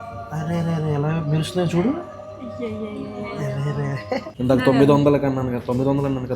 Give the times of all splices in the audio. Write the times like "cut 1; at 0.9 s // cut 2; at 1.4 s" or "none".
cut 1; at 4.3 s